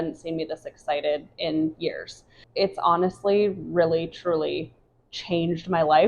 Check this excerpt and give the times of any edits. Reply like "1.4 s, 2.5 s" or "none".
2.4 s

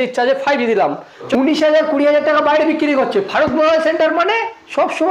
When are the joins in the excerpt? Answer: 1.2 s

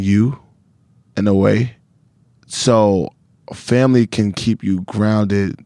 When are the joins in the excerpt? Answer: none

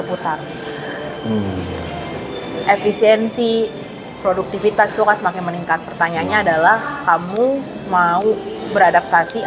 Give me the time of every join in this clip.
none

